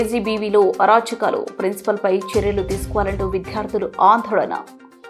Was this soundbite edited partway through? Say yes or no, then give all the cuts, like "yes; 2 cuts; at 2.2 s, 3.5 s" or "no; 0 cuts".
no; 0 cuts